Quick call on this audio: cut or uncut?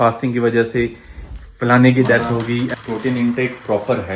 cut